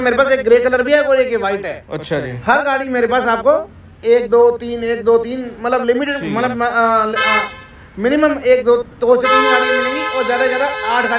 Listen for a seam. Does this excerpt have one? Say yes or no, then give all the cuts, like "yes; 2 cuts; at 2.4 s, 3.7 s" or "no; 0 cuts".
no; 0 cuts